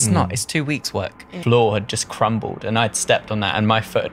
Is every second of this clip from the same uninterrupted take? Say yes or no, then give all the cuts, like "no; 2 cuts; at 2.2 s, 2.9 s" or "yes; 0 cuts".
no; 1 cut; at 1.4 s